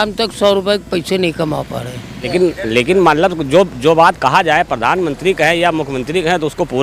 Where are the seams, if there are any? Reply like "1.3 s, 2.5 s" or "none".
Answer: 2.3 s